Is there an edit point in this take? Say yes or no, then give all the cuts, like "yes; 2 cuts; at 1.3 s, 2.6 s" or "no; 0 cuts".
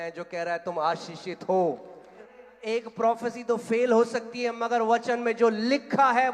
yes; 1 cut; at 2.3 s